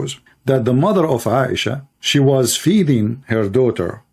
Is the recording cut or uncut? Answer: uncut